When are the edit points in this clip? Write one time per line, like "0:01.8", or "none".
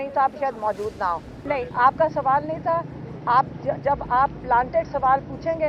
0:01.4